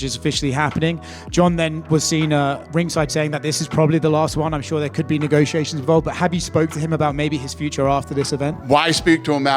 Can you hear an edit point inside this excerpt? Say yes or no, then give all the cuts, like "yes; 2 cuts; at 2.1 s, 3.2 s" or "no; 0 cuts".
yes; 1 cut; at 8.6 s